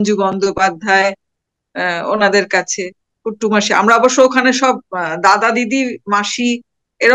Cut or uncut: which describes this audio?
uncut